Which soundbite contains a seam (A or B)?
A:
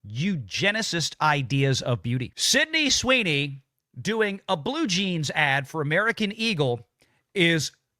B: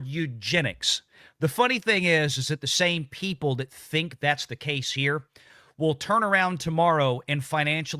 A